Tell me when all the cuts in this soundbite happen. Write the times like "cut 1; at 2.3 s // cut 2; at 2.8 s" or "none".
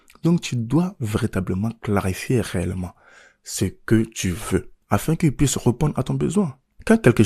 cut 1; at 4.7 s

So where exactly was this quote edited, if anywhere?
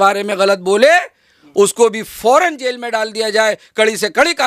none

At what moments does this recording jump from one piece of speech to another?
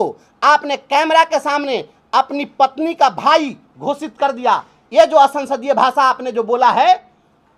none

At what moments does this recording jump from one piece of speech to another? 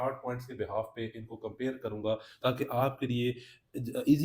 none

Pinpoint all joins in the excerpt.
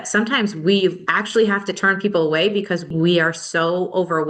cut 1; at 1.1 s // cut 2; at 2.9 s

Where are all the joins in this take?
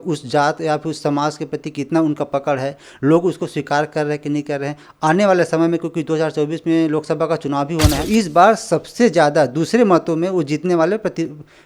cut 1; at 8.1 s

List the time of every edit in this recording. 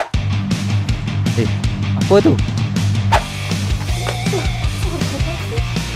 none

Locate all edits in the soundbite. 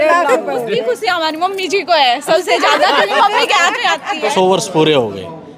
cut 1; at 4.3 s

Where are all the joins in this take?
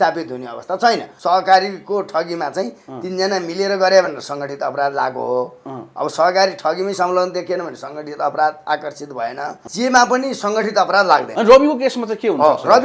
cut 1; at 1.1 s // cut 2; at 9.6 s // cut 3; at 11.3 s

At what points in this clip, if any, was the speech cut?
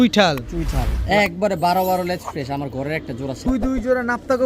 cut 1; at 3.5 s

